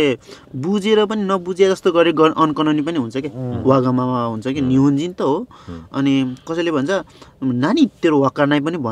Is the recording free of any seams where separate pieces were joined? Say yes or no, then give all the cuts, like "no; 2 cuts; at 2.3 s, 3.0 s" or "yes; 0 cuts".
yes; 0 cuts